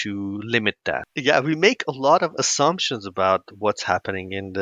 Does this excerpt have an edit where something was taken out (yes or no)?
yes